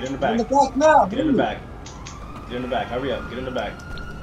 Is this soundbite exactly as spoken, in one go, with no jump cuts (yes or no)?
yes